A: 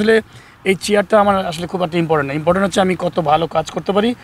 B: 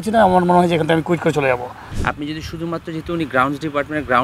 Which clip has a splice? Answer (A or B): B